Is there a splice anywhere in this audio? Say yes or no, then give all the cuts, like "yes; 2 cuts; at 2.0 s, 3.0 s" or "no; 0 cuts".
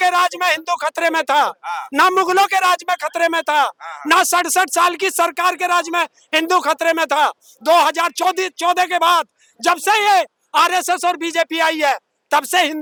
no; 0 cuts